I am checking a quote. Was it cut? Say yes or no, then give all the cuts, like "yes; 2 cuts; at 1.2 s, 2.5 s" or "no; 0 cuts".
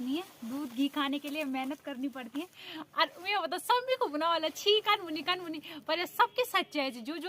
yes; 1 cut; at 2.6 s